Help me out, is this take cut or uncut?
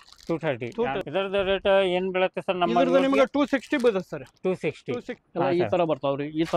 cut